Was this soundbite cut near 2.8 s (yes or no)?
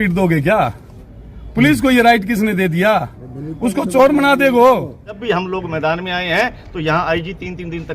no